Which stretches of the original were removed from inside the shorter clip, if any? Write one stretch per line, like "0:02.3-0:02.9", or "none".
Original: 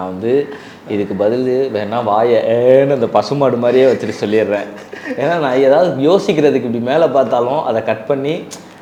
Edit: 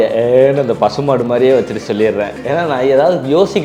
0:04.7-0:05.1